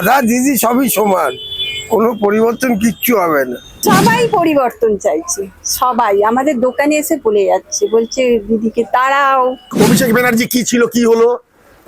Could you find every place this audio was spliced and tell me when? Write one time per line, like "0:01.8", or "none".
0:03.8
0:09.7